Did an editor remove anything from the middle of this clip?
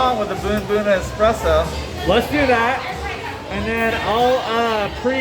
no; 0 cuts

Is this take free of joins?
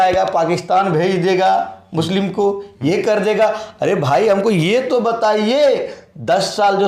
yes; 0 cuts

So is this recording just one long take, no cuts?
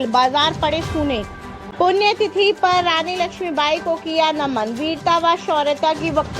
no; 1 cut; at 1.6 s

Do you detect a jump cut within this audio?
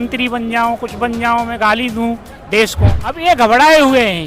yes; 1 cut; at 3.0 s

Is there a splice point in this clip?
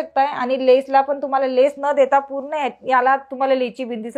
no; 0 cuts

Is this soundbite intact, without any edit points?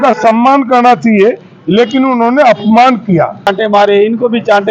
no; 1 cut; at 3.5 s

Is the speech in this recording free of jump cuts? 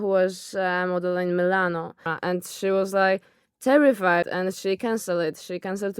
no; 2 cuts; at 2.1 s, 4.3 s

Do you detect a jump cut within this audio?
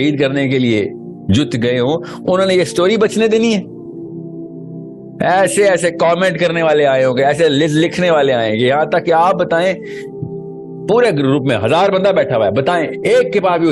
no; 0 cuts

